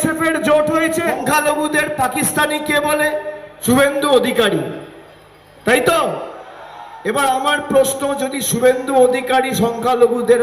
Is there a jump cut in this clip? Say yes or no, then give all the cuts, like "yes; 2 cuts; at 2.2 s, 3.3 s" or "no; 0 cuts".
yes; 2 cuts; at 1.2 s, 3.5 s